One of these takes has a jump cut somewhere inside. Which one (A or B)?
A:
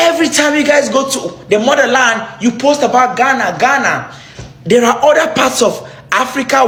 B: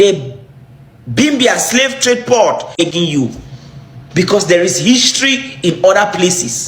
B